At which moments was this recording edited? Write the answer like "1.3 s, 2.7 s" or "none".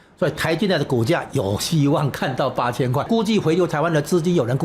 3.0 s